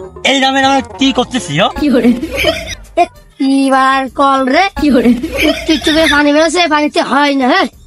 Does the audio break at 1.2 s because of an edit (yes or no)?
no